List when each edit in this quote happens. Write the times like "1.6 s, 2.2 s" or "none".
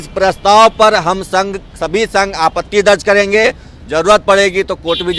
none